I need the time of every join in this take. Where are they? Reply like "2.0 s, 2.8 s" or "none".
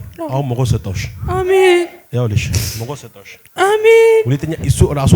none